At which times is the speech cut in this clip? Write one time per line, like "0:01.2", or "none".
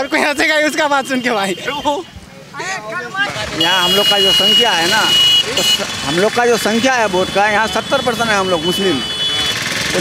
0:03.2